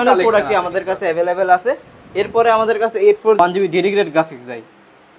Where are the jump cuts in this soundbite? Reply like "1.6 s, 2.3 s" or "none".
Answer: 3.4 s